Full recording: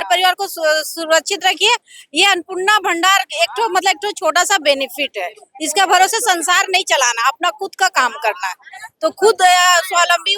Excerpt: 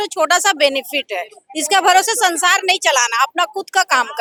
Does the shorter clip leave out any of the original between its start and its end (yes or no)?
no